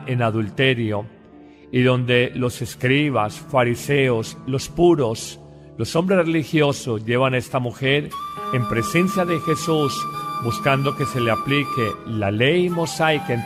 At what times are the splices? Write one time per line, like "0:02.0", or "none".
none

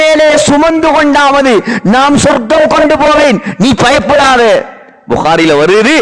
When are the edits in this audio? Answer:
none

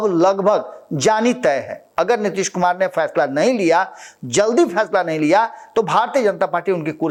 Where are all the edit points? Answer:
none

